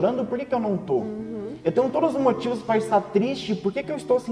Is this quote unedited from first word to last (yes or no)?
yes